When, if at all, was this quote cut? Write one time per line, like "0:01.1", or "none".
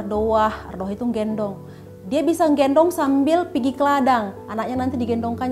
none